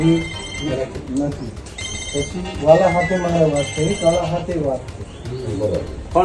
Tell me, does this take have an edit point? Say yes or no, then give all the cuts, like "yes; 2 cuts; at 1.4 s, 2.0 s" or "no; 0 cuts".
no; 0 cuts